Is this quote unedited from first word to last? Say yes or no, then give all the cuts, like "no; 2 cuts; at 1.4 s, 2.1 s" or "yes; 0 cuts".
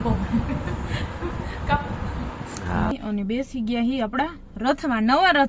no; 1 cut; at 2.9 s